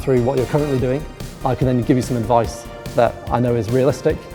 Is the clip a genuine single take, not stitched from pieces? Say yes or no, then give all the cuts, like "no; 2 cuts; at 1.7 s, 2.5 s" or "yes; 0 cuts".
yes; 0 cuts